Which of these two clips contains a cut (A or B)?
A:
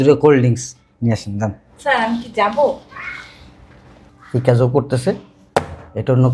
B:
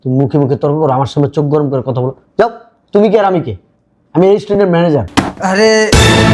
B